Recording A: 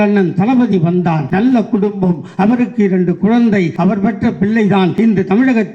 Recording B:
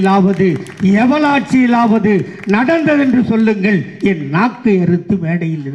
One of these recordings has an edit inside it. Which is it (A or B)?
A